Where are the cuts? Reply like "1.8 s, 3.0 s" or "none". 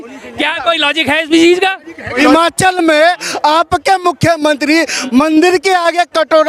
2.2 s